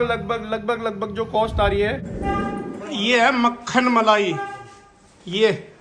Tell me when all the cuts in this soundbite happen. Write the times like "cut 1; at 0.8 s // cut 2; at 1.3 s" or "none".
cut 1; at 2.1 s